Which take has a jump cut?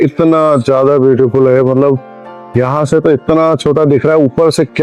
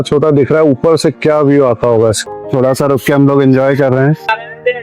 second; 1 cut; at 2.2 s

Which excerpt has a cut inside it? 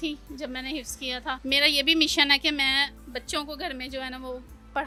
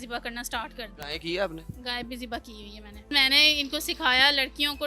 second; 2 cuts; at 0.9 s, 3.1 s

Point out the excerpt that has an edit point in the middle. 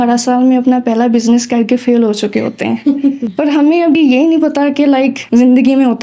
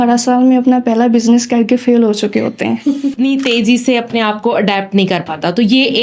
second; 1 cut; at 3.1 s

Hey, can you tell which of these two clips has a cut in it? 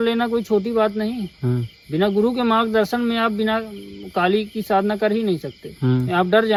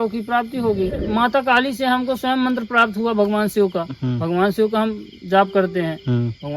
second; 1 cut; at 1.0 s

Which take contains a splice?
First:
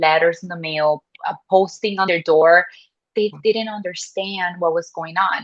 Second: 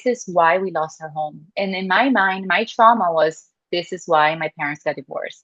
first; 1 cut; at 2.1 s

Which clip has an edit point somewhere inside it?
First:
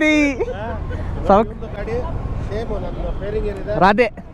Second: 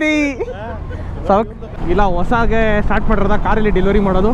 second; 1 cut; at 1.7 s

